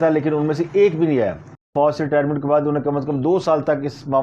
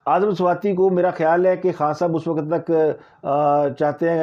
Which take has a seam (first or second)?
first